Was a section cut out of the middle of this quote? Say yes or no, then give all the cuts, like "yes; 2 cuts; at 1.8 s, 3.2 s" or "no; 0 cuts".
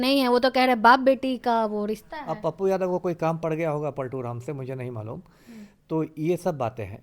no; 0 cuts